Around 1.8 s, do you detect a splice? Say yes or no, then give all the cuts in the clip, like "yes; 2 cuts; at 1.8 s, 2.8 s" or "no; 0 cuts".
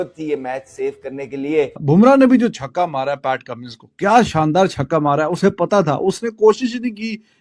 yes; 1 cut; at 1.8 s